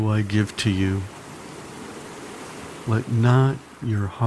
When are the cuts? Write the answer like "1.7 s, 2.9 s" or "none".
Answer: 1.0 s, 2.8 s